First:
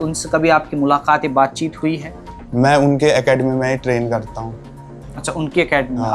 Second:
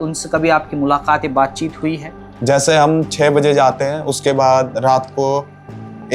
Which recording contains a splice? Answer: second; 1 cut; at 2.3 s

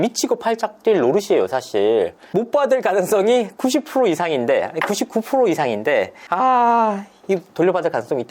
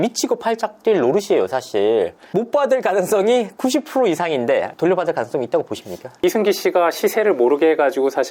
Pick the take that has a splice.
second; 2 cuts; at 4.7 s, 6.1 s

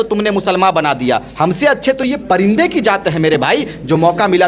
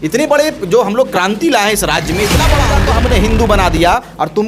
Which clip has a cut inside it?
second; 1 cut; at 2.7 s

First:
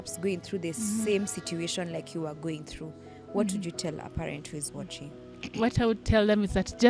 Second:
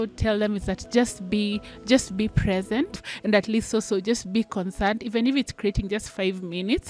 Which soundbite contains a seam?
second; 1 cut; at 3.1 s

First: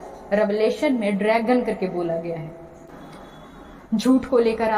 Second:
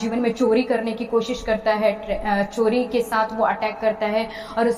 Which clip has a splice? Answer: first; 1 cut; at 3.0 s

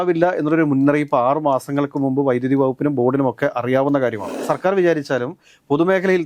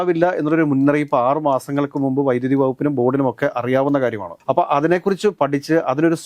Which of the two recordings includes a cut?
first; 1 cut; at 4.4 s

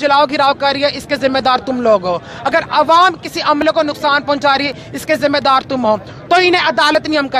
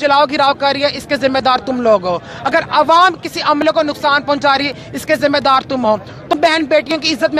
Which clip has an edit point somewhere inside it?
second; 1 cut; at 6.3 s

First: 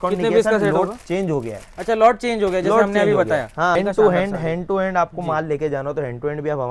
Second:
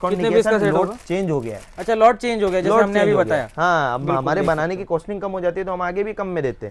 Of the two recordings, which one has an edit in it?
first; 1 cut; at 3.8 s

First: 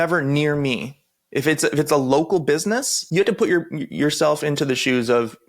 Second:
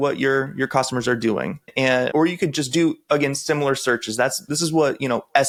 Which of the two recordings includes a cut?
first; 1 cut; at 3.0 s

